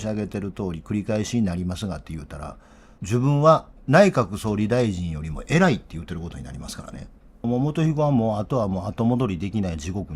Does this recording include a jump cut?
yes; 1 cut; at 7.3 s

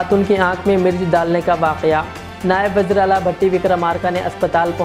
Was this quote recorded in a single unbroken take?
yes; 0 cuts

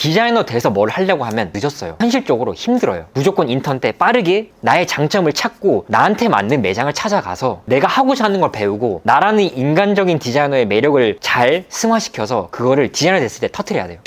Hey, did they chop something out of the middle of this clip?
yes; 4 cuts; at 1.5 s, 3.0 s, 4.5 s, 5.8 s

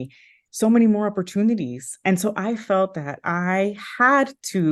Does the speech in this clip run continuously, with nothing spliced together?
yes; 0 cuts

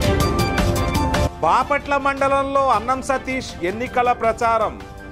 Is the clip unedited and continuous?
no; 1 cut; at 1.3 s

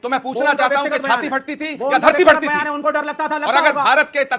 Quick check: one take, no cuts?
yes; 0 cuts

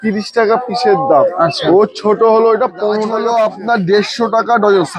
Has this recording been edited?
yes; 1 cut; at 3.1 s

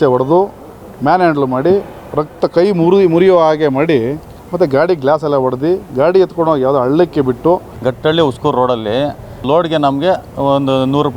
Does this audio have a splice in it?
yes; 2 cuts; at 7.7 s, 9.4 s

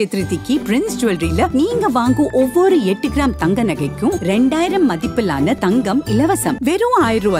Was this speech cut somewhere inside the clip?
no; 0 cuts

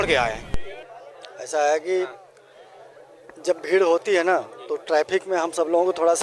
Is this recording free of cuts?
yes; 0 cuts

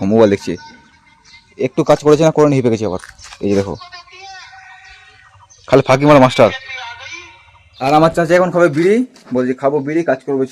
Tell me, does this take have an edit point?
no; 0 cuts

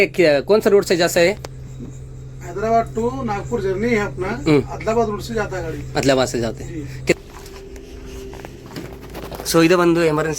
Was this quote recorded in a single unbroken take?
no; 1 cut; at 7.1 s

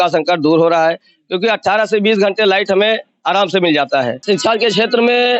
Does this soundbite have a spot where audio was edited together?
yes; 1 cut; at 4.2 s

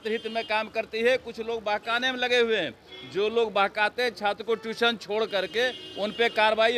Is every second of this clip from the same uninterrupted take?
yes; 0 cuts

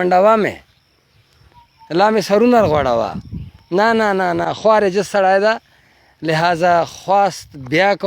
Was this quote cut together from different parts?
no; 0 cuts

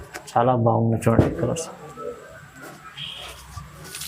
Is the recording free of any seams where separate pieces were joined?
yes; 0 cuts

